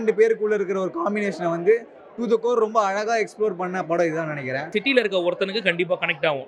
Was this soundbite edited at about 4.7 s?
yes; 1 cut; at 4.7 s

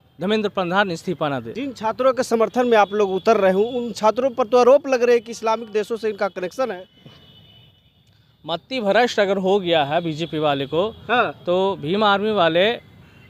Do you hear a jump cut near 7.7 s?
no; 1 cut; at 1.6 s

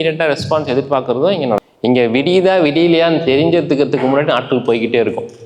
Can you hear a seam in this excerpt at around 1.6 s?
yes; 1 cut; at 1.6 s

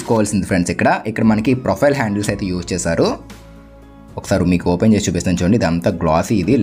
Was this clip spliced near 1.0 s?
no; 0 cuts

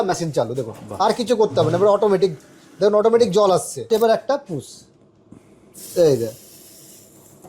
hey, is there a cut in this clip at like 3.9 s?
yes; 1 cut; at 3.9 s

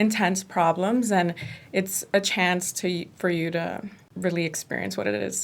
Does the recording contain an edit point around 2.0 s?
no; 1 cut; at 4.0 s

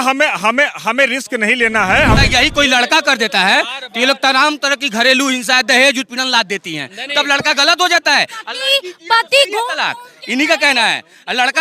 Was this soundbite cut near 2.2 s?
yes; 1 cut; at 2.2 s

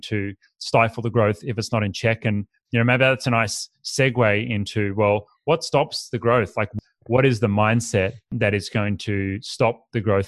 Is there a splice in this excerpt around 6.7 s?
yes; 2 cuts; at 6.7 s, 8.3 s

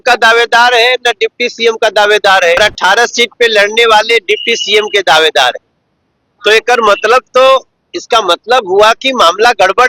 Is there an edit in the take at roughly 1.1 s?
no; 1 cut; at 2.6 s

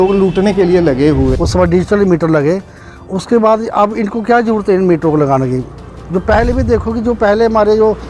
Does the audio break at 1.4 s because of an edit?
yes; 1 cut; at 1.4 s

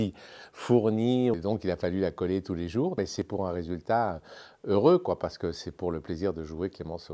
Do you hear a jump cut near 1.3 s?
yes; 2 cuts; at 1.3 s, 3.2 s

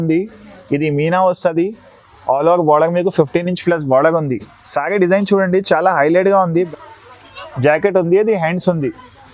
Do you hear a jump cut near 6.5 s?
yes; 1 cut; at 6.5 s

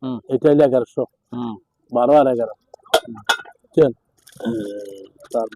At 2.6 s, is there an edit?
no; 0 cuts

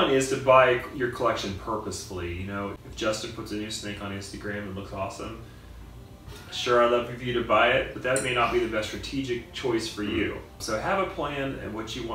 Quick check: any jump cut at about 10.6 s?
yes; 2 cuts; at 2.8 s, 10.6 s

